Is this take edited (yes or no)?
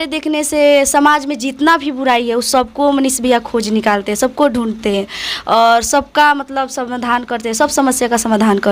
no